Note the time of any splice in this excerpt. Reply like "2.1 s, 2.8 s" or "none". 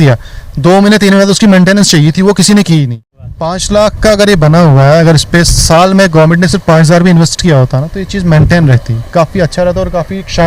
3.3 s